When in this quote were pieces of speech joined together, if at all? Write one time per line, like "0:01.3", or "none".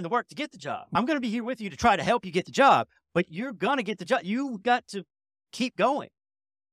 none